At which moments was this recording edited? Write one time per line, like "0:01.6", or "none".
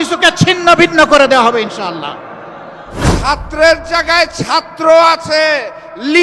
0:03.0